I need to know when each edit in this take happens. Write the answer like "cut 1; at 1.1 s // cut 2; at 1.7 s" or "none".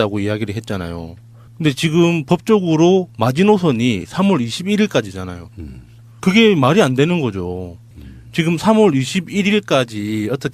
none